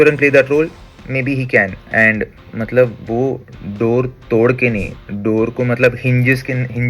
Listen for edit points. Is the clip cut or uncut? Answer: cut